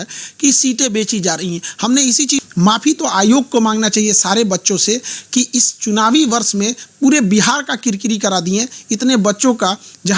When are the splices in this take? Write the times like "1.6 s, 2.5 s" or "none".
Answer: 2.4 s